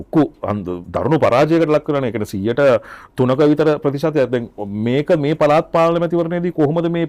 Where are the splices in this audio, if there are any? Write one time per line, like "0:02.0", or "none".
none